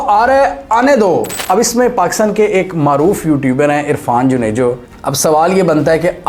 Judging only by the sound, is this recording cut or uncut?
cut